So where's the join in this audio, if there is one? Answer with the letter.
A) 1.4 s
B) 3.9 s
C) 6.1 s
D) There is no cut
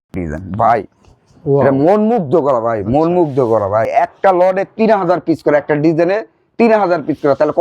B